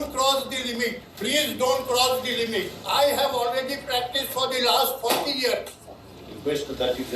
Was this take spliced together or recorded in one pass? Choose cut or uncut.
cut